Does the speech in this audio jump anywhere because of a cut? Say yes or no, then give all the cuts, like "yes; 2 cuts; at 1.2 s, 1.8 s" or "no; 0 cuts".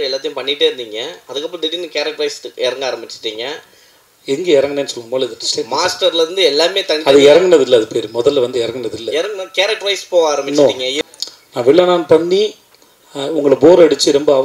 yes; 1 cut; at 10.9 s